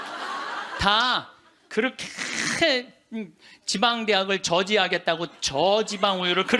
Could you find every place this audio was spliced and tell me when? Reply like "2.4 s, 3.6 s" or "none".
none